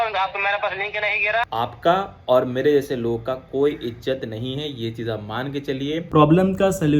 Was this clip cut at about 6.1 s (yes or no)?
yes